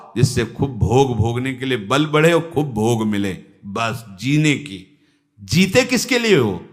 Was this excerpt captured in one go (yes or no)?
yes